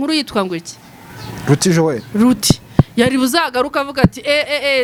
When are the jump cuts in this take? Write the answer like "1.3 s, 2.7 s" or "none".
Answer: none